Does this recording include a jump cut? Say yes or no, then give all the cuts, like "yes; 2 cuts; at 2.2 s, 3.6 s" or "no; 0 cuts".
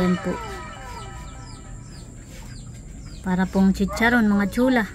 no; 0 cuts